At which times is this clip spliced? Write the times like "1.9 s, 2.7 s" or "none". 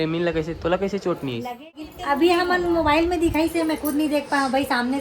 1.9 s